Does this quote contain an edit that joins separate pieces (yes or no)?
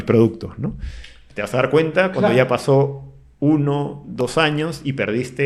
no